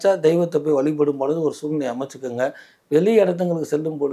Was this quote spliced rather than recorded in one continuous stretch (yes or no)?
no